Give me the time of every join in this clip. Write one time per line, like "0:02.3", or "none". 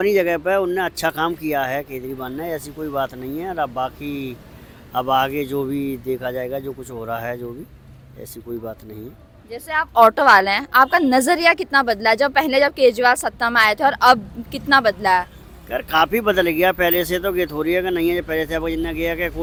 none